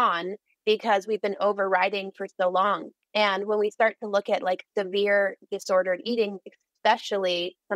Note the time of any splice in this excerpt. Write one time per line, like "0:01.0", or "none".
0:02.9